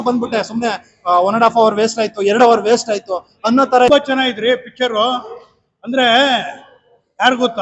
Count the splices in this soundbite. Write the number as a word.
one